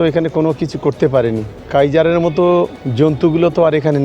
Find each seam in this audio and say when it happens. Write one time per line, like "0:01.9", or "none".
0:01.5
0:02.8